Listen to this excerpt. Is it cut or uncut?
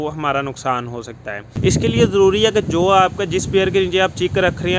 cut